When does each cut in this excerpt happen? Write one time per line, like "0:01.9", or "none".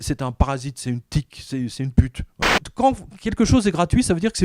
0:02.6

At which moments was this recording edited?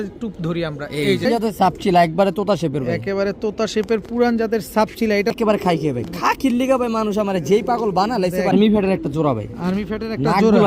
0:01.3
0:05.3
0:08.5

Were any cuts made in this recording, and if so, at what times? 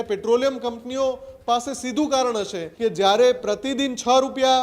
0:02.6

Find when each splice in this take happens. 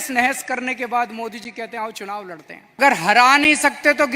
0:02.8

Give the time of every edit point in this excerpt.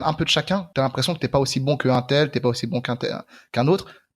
none

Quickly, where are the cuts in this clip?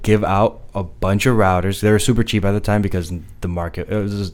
none

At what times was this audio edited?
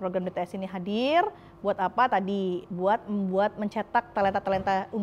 none

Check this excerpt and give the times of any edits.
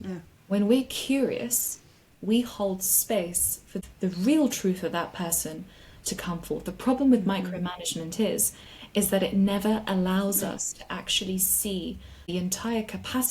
0:03.8
0:12.3

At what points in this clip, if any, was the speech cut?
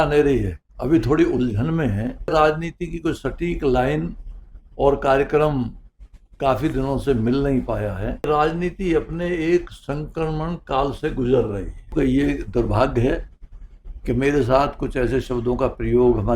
0:02.3
0:08.3
0:11.9

